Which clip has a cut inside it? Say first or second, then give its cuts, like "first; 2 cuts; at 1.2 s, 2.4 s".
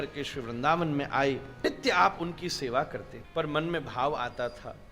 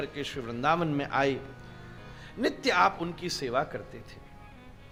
first; 2 cuts; at 1.5 s, 3.2 s